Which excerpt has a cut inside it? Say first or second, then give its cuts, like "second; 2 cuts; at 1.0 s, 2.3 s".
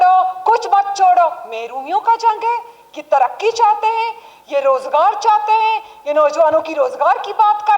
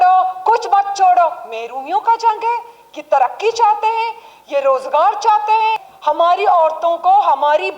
second; 1 cut; at 5.9 s